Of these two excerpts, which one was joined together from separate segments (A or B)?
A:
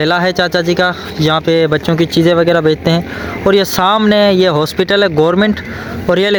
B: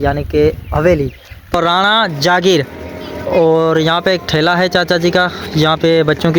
B